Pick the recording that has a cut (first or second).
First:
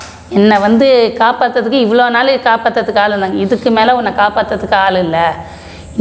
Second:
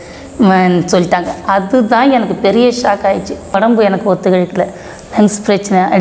second